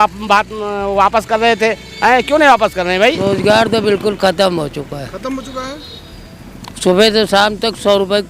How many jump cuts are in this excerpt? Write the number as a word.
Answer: one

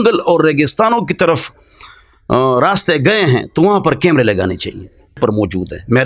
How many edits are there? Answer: one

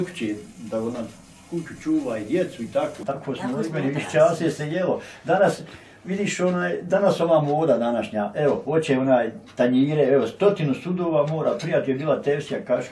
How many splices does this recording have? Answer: one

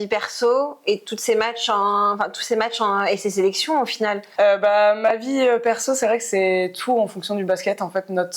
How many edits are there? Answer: one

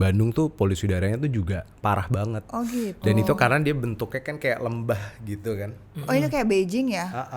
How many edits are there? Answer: zero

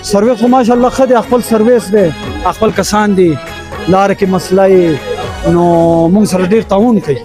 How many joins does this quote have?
zero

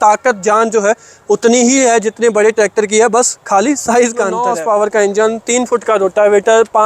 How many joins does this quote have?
one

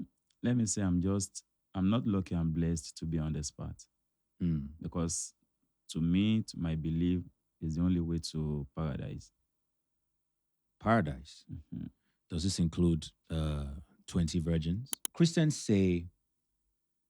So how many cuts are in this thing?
one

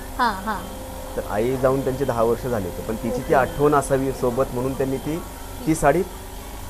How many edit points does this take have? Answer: zero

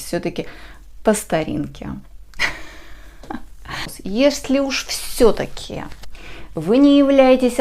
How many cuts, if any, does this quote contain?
one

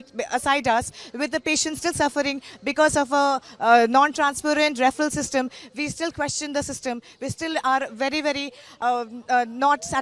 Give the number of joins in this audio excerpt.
zero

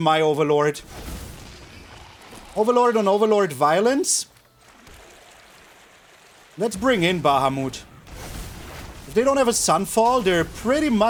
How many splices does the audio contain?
zero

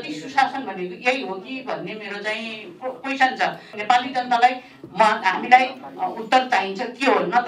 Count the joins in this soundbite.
one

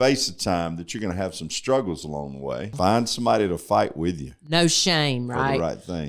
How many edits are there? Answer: one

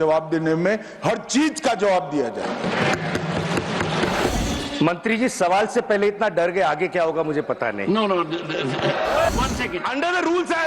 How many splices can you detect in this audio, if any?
two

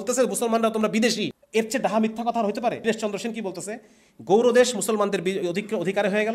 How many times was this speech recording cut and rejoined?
two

